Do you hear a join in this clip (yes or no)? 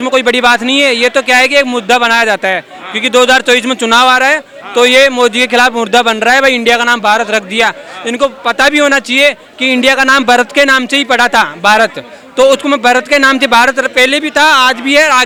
no